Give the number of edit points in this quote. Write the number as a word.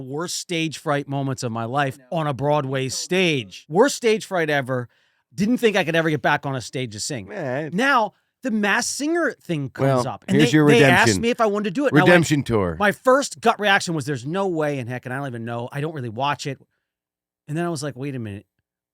one